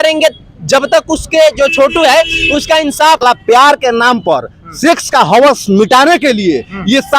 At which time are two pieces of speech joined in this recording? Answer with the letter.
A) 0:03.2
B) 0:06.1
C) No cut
A